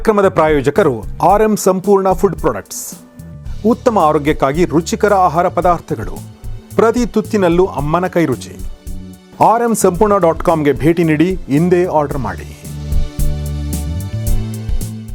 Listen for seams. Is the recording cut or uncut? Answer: uncut